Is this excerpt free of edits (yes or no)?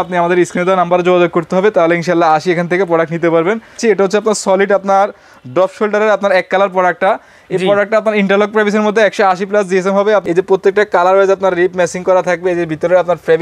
no